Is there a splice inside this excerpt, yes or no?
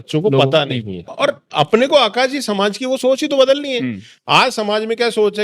yes